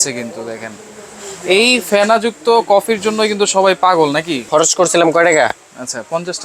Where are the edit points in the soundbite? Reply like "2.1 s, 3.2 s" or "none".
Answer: 4.4 s